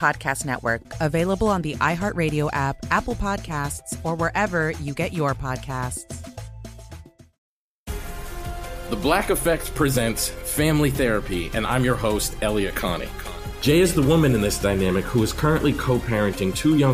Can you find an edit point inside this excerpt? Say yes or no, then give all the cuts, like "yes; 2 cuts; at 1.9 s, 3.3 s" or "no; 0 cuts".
yes; 1 cut; at 7.2 s